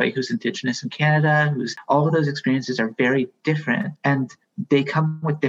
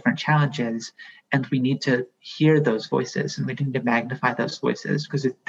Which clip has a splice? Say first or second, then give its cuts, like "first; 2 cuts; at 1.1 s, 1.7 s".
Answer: first; 2 cuts; at 1.8 s, 3.9 s